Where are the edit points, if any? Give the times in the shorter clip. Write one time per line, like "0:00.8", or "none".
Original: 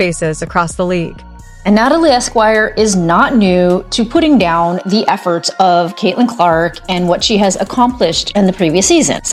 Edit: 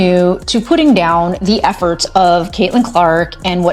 none